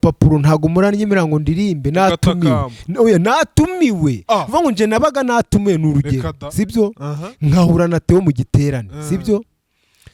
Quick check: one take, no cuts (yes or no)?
yes